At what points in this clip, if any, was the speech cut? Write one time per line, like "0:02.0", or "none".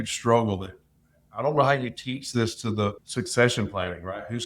0:03.0